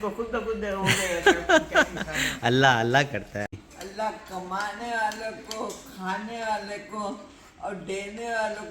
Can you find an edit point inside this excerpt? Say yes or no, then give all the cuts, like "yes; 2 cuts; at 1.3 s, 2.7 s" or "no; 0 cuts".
yes; 1 cut; at 3.5 s